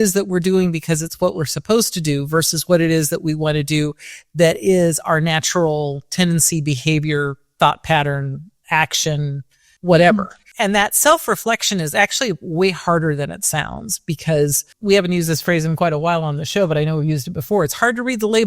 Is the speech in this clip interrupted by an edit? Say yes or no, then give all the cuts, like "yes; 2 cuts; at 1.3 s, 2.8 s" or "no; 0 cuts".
yes; 3 cuts; at 9.7 s, 10.4 s, 14.7 s